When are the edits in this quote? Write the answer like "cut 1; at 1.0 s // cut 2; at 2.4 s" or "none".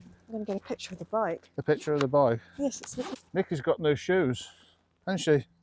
cut 1; at 3.1 s